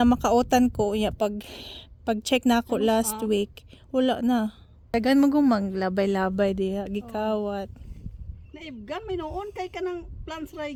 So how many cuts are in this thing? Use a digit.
0